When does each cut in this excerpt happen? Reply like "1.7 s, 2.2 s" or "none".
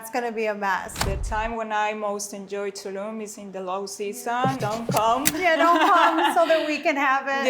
0.9 s, 4.6 s